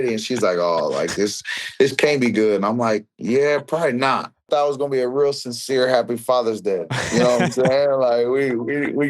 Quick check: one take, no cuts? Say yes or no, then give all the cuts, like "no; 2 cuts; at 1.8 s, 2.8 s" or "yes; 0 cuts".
no; 1 cut; at 4.4 s